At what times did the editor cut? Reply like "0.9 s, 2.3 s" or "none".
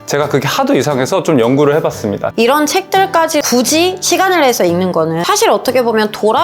2.3 s, 3.5 s, 5.2 s